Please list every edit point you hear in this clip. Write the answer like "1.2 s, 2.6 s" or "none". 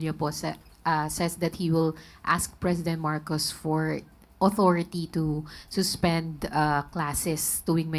none